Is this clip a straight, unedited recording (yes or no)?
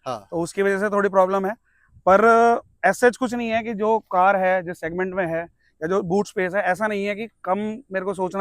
yes